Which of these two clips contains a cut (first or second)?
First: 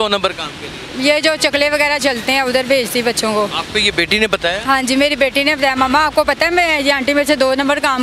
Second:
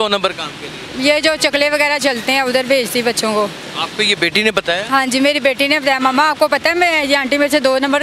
first